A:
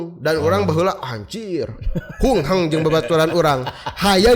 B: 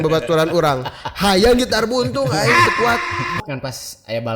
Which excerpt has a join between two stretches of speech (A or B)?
B